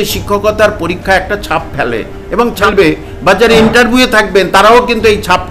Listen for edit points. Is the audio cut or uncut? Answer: cut